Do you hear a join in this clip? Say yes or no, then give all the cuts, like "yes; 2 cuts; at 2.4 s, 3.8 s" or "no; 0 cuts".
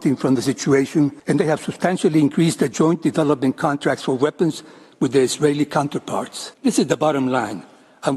yes; 2 cuts; at 1.2 s, 6.4 s